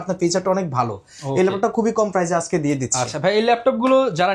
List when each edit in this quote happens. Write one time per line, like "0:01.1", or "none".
none